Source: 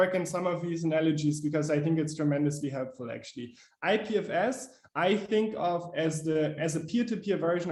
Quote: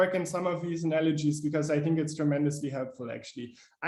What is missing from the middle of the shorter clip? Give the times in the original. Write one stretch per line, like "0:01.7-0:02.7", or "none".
none